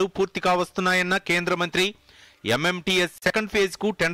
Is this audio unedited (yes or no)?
yes